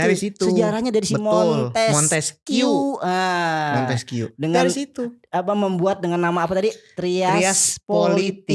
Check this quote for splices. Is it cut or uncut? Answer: uncut